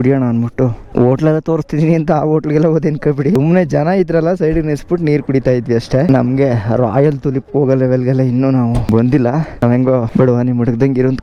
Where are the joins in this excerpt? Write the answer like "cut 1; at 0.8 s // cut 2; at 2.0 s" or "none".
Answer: none